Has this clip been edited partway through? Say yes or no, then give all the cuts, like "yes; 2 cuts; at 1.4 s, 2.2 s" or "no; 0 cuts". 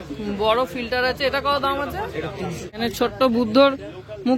yes; 1 cut; at 2.7 s